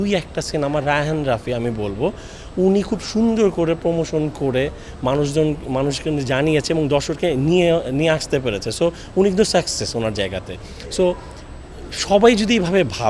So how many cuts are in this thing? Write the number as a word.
zero